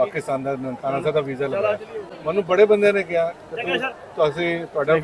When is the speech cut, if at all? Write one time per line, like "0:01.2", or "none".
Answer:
none